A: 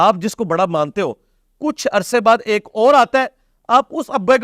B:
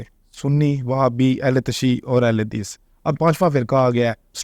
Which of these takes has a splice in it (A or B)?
B